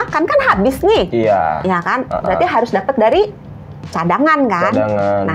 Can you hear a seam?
no; 0 cuts

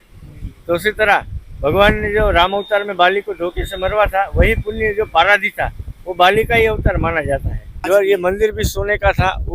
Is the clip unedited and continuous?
no; 1 cut; at 7.7 s

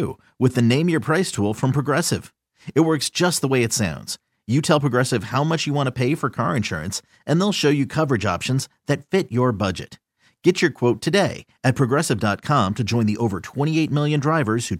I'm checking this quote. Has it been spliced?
no; 0 cuts

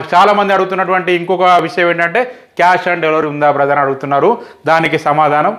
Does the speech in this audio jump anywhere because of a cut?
no; 0 cuts

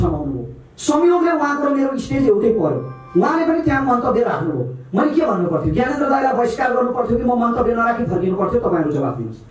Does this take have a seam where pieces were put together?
no; 0 cuts

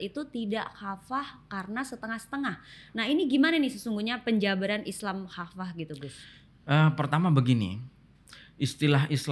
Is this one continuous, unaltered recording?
yes; 0 cuts

